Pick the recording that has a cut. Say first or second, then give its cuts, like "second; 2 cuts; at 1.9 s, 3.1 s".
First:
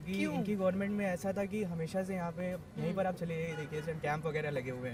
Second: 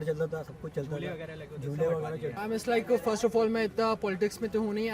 second; 1 cut; at 2.3 s